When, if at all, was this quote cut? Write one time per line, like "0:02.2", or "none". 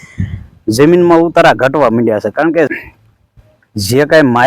0:02.7